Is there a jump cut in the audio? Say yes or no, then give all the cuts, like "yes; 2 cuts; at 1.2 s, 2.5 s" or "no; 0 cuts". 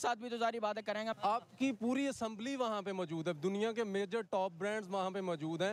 yes; 1 cut; at 1.1 s